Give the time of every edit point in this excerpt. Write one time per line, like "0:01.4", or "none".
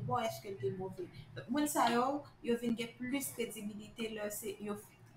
none